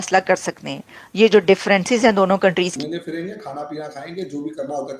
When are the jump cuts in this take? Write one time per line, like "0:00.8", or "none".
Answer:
0:02.7